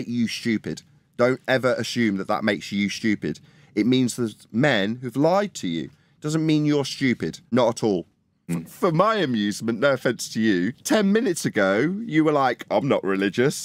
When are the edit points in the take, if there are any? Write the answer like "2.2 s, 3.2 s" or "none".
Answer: 7.4 s, 8.5 s